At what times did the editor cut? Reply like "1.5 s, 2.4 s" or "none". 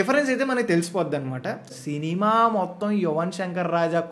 1.7 s